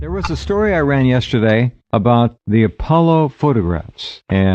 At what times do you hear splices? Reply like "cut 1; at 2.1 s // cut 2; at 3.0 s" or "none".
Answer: cut 1; at 3.1 s